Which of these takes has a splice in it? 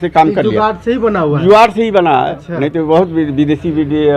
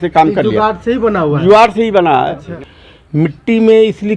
second; 1 cut; at 2.5 s

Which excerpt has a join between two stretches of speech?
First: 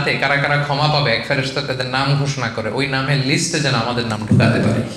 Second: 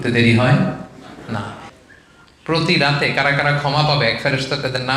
second; 1 cut; at 1.7 s

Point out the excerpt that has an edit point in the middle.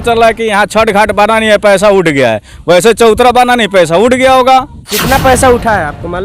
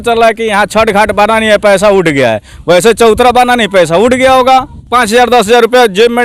first; 1 cut; at 4.9 s

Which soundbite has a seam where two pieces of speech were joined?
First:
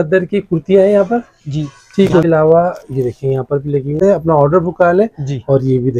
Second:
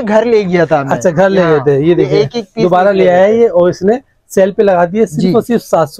first; 2 cuts; at 2.2 s, 4.0 s

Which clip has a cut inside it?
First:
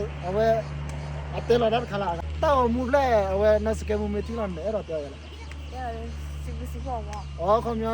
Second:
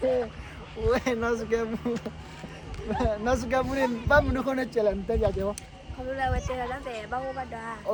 first; 1 cut; at 2.2 s

